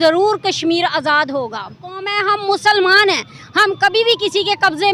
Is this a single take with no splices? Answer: no; 1 cut; at 2.1 s

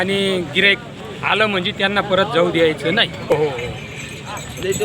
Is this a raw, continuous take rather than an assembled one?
no; 1 cut; at 3.3 s

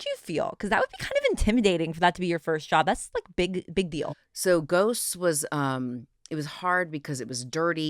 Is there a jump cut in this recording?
yes; 1 cut; at 4.1 s

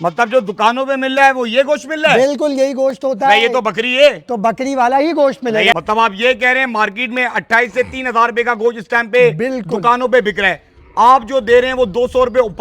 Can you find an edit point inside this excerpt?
yes; 1 cut; at 5.7 s

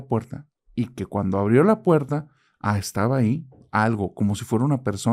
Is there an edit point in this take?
no; 0 cuts

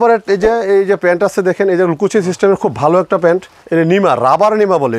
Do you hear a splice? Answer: yes; 1 cut; at 3.5 s

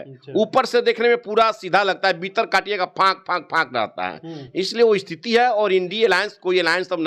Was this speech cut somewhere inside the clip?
no; 0 cuts

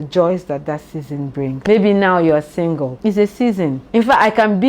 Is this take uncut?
no; 3 cuts; at 1.6 s, 2.9 s, 3.8 s

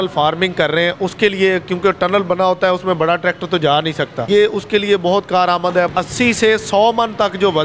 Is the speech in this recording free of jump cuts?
no; 2 cuts; at 4.3 s, 5.9 s

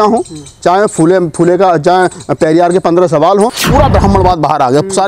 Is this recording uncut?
no; 1 cut; at 3.6 s

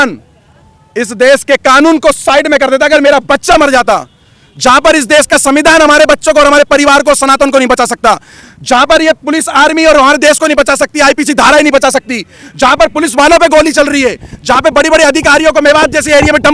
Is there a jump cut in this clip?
no; 0 cuts

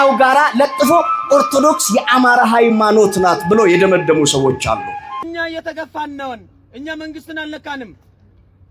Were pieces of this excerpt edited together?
yes; 1 cut; at 5.4 s

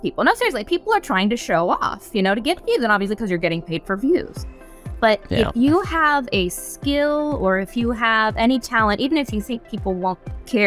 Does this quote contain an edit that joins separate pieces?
no; 0 cuts

